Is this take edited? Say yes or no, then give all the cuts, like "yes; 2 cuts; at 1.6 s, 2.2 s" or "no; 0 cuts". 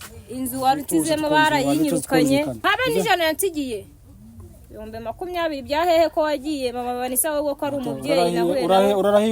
yes; 1 cut; at 2.5 s